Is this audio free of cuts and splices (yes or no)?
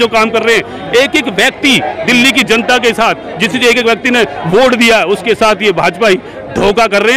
yes